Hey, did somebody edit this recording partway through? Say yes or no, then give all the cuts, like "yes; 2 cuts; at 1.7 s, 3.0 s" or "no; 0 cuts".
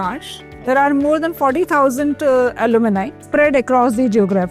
yes; 1 cut; at 3.2 s